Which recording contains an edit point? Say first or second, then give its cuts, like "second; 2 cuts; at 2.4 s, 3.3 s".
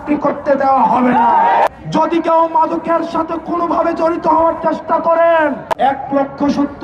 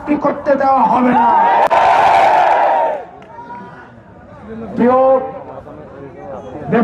first; 2 cuts; at 1.7 s, 5.6 s